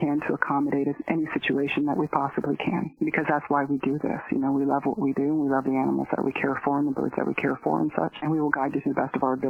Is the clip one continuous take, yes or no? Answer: no